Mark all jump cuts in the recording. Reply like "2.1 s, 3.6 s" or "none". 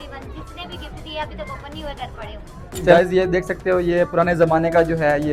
2.9 s